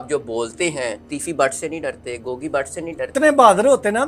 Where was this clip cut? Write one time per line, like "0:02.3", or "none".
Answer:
0:01.1
0:03.1